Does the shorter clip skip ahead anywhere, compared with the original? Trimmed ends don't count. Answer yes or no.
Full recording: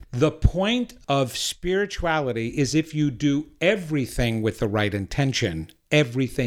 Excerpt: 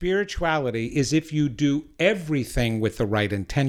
no